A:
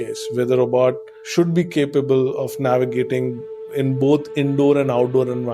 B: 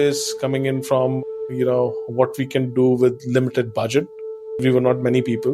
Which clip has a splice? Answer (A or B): B